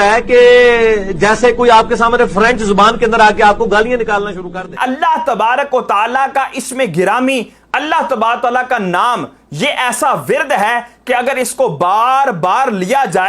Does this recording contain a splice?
yes; 1 cut; at 4.7 s

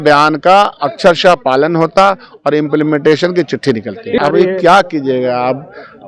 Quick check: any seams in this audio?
yes; 1 cut; at 4.2 s

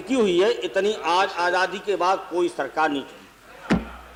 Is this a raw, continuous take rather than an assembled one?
yes; 0 cuts

